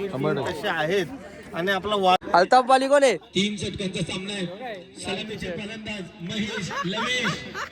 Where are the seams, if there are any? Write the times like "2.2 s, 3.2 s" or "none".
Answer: 2.2 s

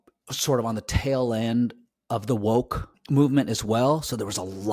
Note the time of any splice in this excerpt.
3.0 s

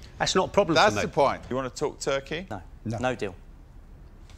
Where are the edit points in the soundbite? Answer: 1.5 s

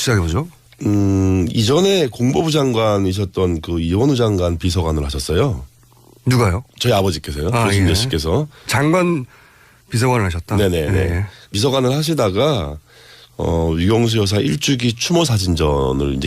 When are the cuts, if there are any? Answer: 11.7 s

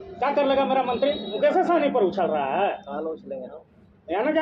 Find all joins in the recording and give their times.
1.3 s

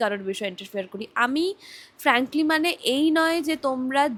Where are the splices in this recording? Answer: none

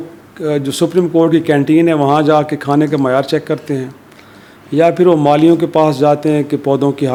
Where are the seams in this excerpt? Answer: none

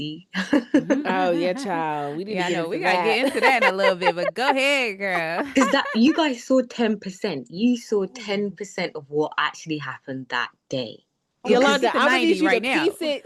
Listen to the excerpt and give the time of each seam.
none

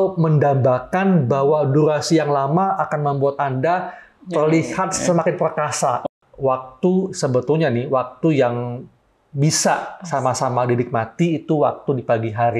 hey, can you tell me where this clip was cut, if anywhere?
6.0 s

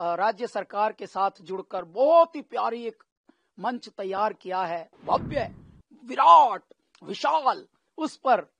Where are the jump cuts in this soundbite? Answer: 4.9 s

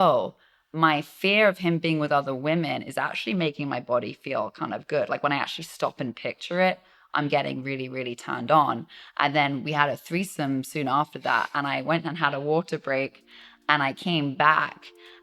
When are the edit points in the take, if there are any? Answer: none

